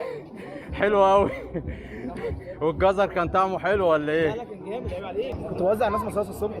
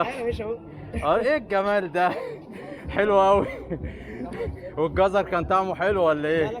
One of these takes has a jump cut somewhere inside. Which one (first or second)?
first